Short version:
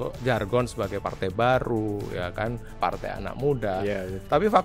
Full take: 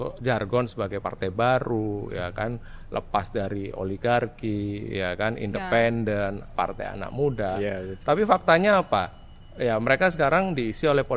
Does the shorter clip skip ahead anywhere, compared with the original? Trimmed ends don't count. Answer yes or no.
yes